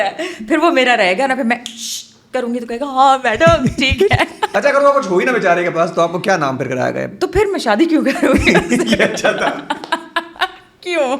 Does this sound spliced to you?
yes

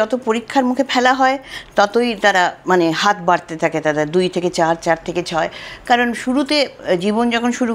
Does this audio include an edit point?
no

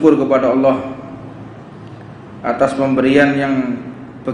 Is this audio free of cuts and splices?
yes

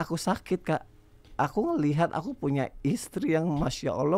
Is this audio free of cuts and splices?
yes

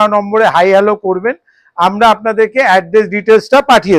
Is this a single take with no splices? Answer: yes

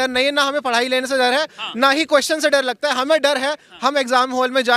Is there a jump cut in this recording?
no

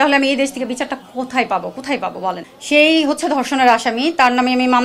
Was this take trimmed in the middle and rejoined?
yes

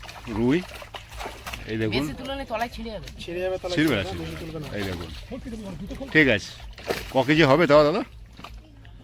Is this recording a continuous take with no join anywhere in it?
yes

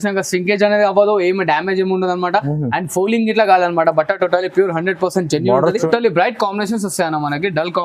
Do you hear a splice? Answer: yes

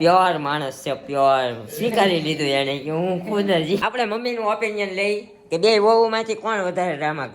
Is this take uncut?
no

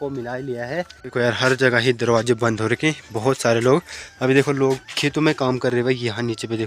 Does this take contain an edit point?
yes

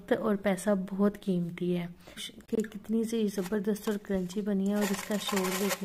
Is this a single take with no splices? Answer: no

